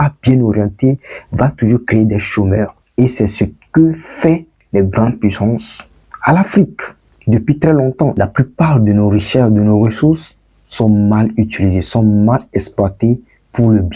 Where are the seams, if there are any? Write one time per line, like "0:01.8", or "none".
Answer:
0:02.8
0:08.1